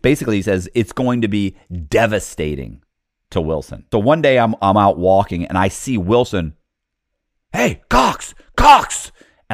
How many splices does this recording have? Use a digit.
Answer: 1